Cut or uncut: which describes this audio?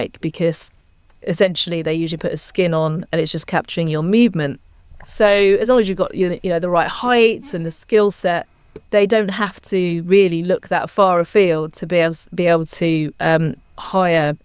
uncut